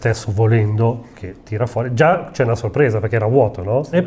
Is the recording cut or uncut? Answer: uncut